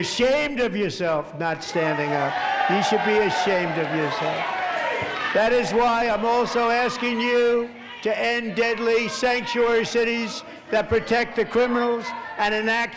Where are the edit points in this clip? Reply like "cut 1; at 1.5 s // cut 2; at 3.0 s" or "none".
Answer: none